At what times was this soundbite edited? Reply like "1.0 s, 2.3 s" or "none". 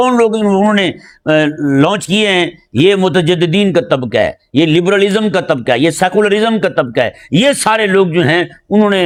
none